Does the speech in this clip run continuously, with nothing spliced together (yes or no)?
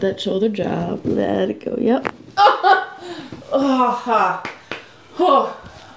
yes